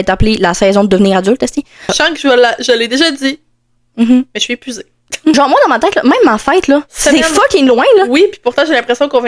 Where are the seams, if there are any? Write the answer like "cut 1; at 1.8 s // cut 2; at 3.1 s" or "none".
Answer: cut 1; at 1.8 s // cut 2; at 5.3 s